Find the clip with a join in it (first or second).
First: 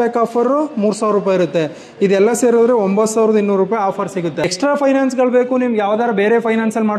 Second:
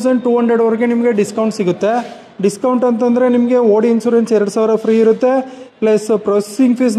first